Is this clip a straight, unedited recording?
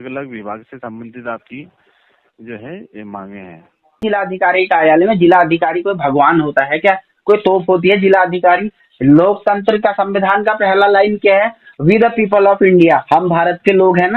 no; 1 cut; at 4.0 s

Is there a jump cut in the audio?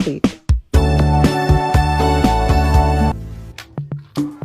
yes; 1 cut; at 3.1 s

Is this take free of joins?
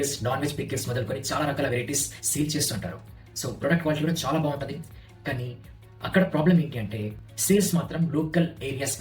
yes; 0 cuts

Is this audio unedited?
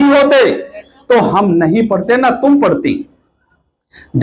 yes; 0 cuts

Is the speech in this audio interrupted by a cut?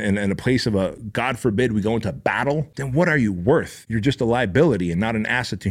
yes; 2 cuts; at 2.8 s, 3.8 s

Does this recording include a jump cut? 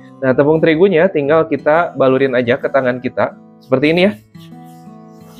no; 0 cuts

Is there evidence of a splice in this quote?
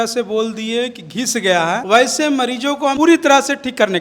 yes; 2 cuts; at 1.8 s, 2.9 s

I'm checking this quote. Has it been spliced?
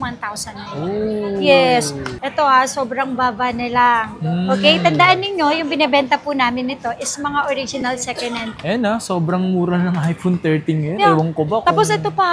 yes; 2 cuts; at 2.2 s, 8.6 s

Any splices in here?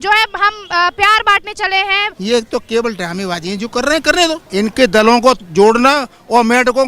yes; 2 cuts; at 2.1 s, 4.4 s

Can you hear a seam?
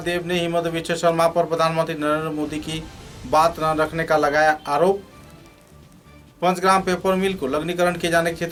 no; 0 cuts

